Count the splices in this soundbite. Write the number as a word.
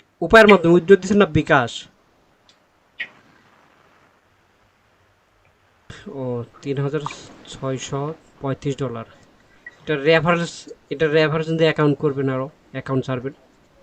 one